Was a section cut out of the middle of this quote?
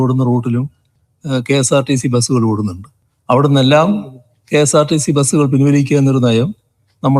no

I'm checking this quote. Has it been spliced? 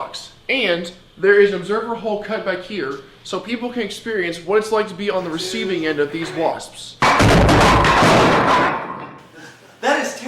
no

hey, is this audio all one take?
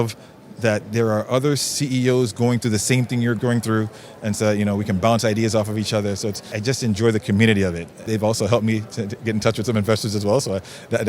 no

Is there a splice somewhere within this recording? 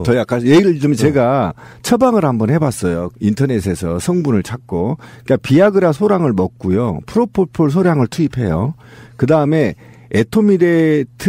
yes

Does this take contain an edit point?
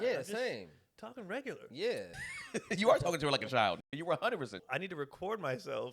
yes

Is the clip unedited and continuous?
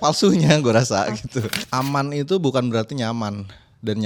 no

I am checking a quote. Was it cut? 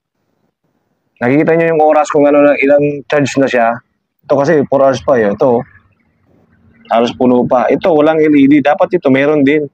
no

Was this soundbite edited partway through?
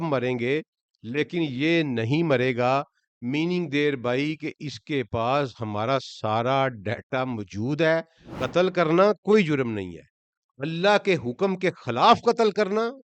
yes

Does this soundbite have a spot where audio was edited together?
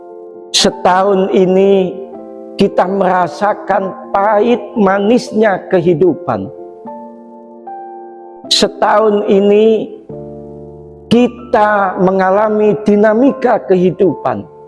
no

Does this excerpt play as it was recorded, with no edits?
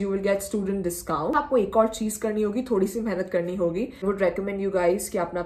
no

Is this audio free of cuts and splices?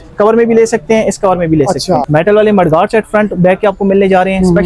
no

